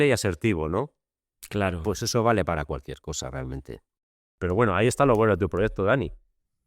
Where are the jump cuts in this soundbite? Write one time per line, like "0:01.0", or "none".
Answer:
0:04.2